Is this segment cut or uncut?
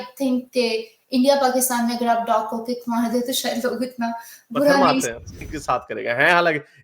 cut